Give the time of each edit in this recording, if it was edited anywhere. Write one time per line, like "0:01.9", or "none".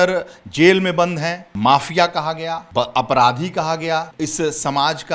0:01.4
0:02.5
0:04.1